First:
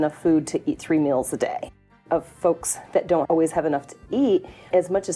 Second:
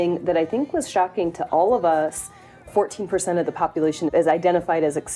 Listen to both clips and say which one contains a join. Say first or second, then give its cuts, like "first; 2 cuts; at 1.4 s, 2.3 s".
first; 2 cuts; at 1.8 s, 3.3 s